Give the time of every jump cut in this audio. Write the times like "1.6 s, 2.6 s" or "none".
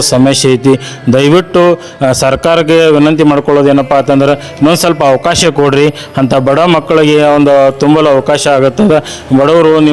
none